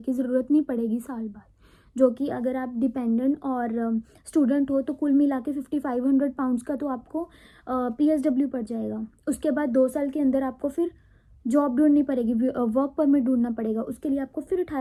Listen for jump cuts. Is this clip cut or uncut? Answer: uncut